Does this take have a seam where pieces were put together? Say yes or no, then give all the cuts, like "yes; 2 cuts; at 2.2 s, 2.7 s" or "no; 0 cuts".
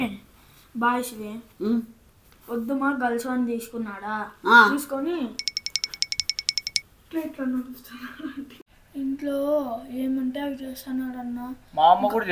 yes; 1 cut; at 8.5 s